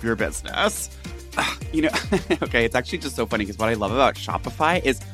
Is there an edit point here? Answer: yes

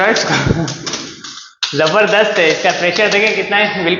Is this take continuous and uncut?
yes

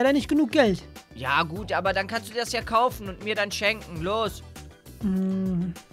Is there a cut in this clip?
no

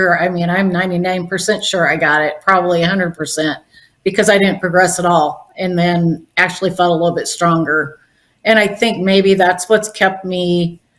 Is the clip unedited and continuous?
yes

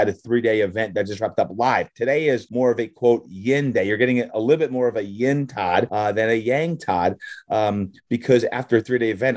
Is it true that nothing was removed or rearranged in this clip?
no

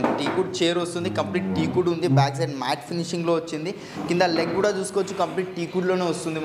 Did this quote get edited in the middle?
no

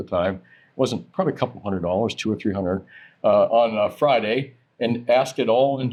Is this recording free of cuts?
yes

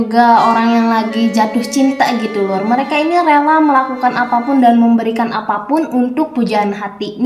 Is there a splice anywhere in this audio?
no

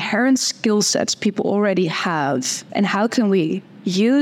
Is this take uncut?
no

